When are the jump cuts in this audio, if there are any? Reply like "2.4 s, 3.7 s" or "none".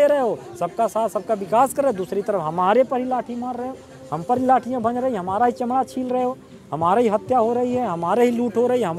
none